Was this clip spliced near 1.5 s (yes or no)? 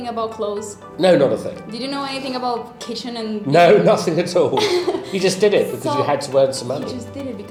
no